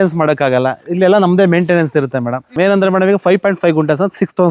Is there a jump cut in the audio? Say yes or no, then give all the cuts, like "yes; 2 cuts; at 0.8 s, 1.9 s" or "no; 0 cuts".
yes; 1 cut; at 2.5 s